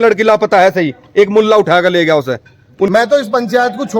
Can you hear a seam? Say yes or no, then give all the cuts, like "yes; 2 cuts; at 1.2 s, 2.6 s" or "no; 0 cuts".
yes; 1 cut; at 2.9 s